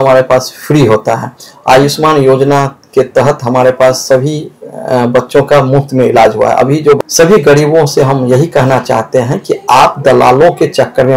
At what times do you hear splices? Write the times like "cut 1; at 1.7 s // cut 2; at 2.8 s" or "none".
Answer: cut 1; at 7.0 s